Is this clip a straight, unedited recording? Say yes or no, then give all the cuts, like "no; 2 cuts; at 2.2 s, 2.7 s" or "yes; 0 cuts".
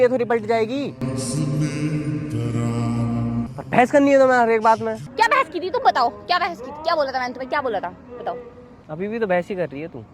no; 2 cuts; at 3.5 s, 5.0 s